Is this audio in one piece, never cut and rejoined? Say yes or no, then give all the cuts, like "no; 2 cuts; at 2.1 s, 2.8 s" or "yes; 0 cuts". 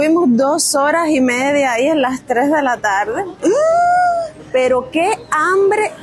yes; 0 cuts